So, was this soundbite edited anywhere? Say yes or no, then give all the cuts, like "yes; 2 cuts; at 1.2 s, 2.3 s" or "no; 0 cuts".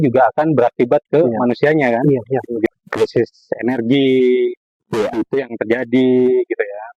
yes; 1 cut; at 2.7 s